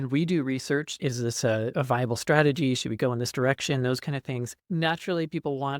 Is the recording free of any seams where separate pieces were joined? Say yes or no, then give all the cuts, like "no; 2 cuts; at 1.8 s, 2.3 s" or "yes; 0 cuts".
no; 2 cuts; at 1.0 s, 4.6 s